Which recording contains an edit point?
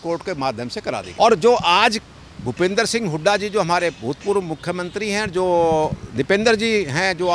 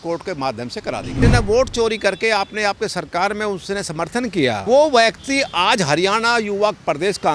second; 2 cuts; at 1.2 s, 4.6 s

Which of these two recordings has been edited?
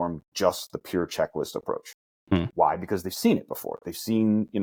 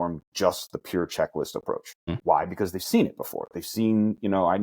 second; 1 cut; at 2.2 s

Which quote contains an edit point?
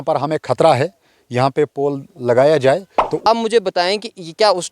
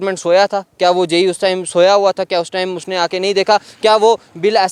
first; 1 cut; at 3.3 s

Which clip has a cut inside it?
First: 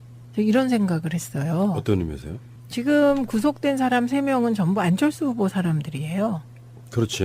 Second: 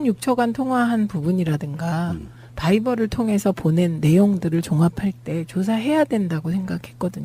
first; 1 cut; at 4.6 s

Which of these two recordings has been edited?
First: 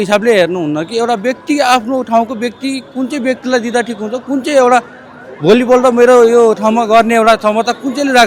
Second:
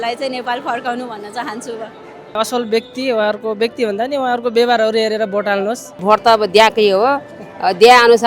second; 2 cuts; at 2.4 s, 6.0 s

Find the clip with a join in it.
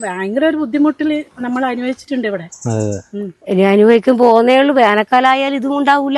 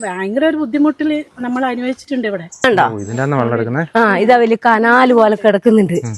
second; 1 cut; at 2.6 s

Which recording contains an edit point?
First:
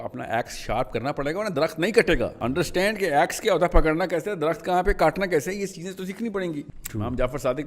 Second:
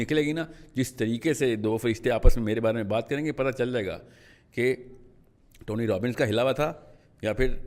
first; 2 cuts; at 2.4 s, 6.7 s

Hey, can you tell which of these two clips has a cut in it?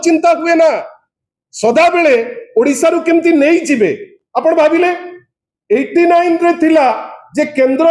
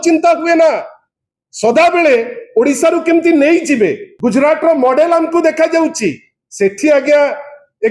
second; 1 cut; at 4.1 s

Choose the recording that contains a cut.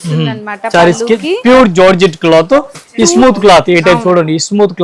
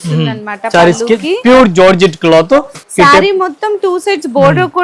second; 1 cut; at 2.8 s

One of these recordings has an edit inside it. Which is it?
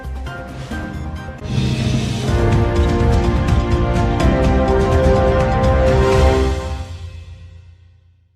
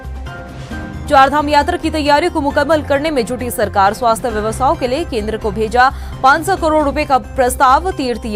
second; 1 cut; at 0.9 s

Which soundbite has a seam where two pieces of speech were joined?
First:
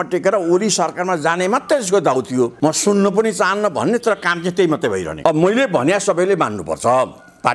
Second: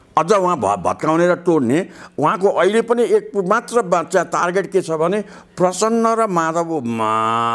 first; 2 cuts; at 2.5 s, 5.1 s

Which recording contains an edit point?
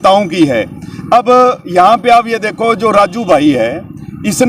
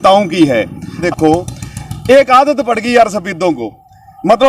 second; 1 cut; at 1.0 s

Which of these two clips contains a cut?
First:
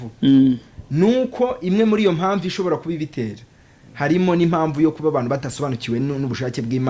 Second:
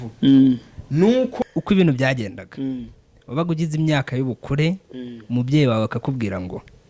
second; 1 cut; at 1.3 s

